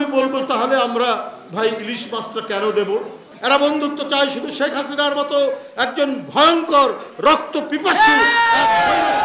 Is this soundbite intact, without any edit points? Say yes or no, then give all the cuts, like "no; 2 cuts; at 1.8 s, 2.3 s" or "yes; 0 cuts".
no; 1 cut; at 3.2 s